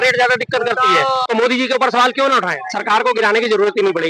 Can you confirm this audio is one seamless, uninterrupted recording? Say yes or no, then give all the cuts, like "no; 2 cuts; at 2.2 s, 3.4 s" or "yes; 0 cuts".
no; 2 cuts; at 1.3 s, 2.6 s